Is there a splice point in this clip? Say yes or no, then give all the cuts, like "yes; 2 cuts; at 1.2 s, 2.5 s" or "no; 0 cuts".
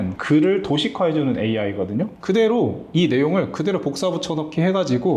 no; 0 cuts